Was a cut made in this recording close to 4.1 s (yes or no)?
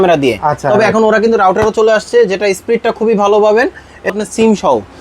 yes